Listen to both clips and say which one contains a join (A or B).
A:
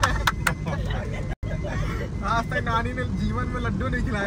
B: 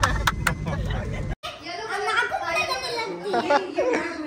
B